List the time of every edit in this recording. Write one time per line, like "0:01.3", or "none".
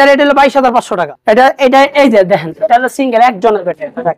0:01.1

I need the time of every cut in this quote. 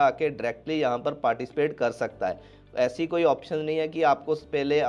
none

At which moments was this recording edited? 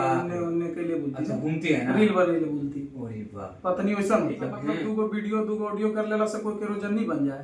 0:04.6

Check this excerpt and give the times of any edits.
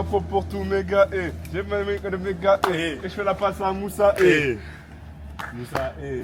none

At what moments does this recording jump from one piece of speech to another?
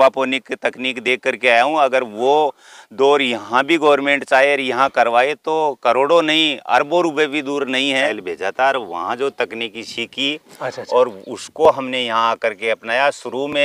0:08.2

